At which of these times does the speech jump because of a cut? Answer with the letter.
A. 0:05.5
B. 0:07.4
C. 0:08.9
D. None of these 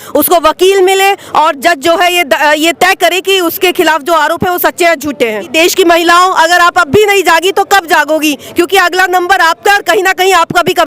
A